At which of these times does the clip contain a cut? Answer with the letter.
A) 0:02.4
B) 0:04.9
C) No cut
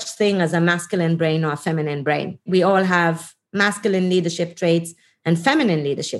A